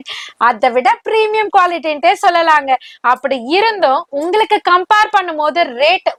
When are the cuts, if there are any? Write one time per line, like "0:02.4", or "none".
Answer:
none

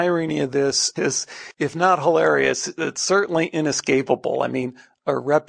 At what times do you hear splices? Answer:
0:00.9

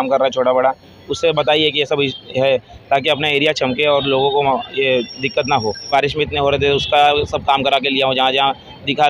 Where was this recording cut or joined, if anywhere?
0:05.9

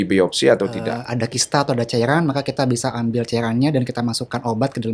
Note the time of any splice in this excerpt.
0:01.0

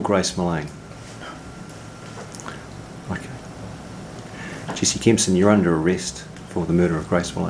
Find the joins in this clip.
none

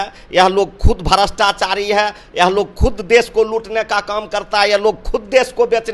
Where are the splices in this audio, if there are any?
none

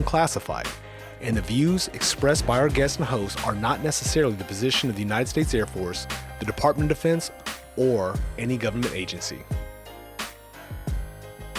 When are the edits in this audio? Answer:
0:09.3

